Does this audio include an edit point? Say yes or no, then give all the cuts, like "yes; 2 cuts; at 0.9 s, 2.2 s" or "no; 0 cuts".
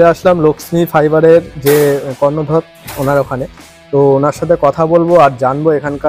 no; 0 cuts